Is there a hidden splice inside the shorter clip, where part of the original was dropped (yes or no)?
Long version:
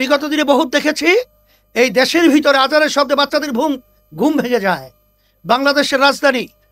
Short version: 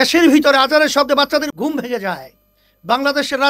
yes